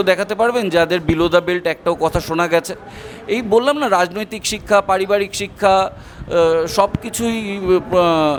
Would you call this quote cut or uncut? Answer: uncut